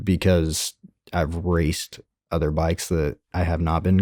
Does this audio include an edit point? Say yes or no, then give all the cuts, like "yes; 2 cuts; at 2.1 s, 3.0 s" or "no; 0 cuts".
no; 0 cuts